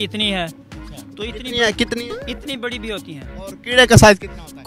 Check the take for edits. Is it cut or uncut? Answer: uncut